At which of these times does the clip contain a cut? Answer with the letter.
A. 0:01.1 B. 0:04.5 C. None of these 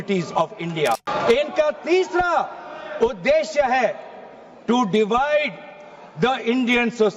A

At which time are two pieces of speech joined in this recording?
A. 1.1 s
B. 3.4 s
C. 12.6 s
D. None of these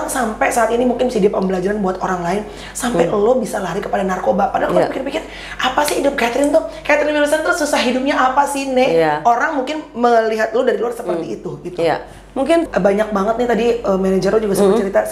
C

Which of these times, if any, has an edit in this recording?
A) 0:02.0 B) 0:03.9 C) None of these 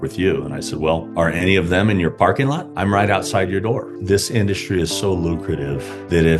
B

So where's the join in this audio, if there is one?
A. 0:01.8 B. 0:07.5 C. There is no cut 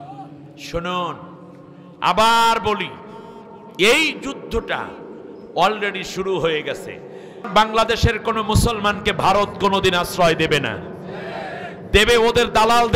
B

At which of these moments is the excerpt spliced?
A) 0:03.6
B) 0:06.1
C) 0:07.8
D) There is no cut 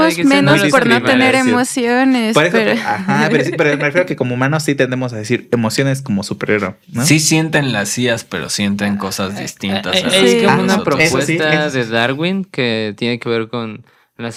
D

